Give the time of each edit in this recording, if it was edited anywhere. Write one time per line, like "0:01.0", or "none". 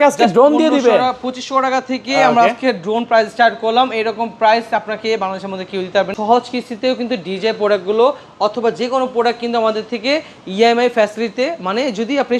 0:06.1

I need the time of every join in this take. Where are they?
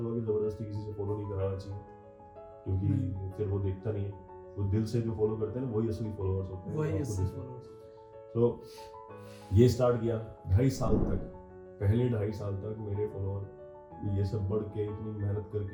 none

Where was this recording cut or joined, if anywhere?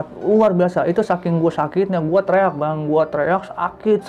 none

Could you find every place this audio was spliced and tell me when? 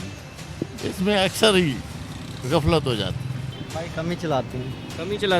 0:03.5

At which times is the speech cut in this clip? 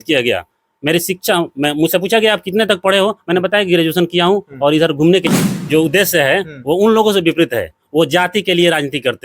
0:05.3

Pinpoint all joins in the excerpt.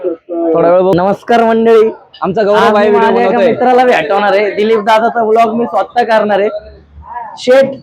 0:00.9

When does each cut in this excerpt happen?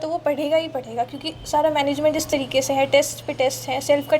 none

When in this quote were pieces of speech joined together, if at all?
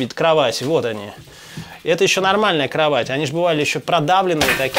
none

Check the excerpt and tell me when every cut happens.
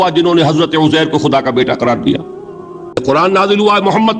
0:02.9

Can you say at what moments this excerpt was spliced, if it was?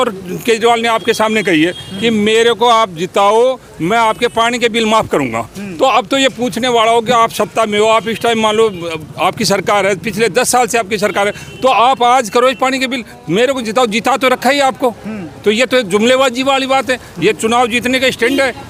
none

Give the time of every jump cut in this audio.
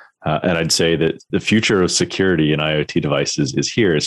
0:01.2

